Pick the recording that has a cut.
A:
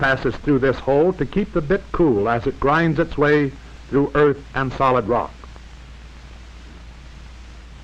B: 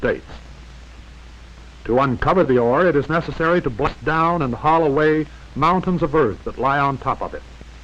B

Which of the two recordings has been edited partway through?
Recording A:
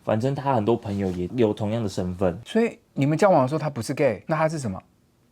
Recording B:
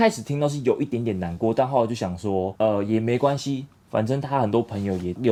A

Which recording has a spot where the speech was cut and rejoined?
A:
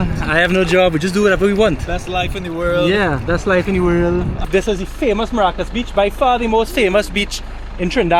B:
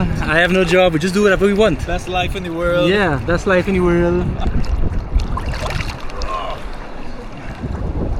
A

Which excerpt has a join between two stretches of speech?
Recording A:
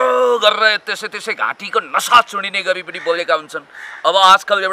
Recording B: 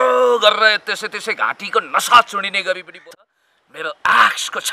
B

